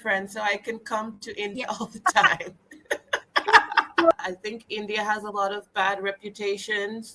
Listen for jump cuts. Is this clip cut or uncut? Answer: cut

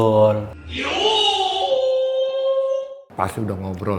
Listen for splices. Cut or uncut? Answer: cut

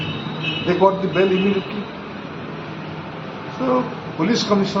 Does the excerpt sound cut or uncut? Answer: uncut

